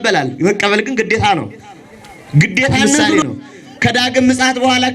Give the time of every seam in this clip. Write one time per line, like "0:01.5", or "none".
0:03.2